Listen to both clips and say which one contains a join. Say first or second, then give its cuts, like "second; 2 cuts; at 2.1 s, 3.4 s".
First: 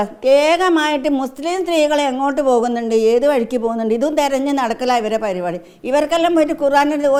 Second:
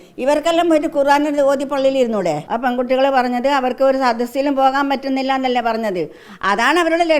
second; 1 cut; at 2.5 s